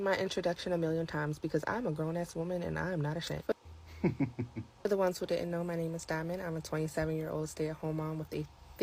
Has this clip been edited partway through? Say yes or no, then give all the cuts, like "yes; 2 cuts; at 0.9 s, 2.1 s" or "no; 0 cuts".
no; 0 cuts